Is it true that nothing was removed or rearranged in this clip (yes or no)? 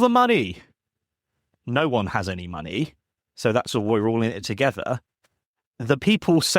no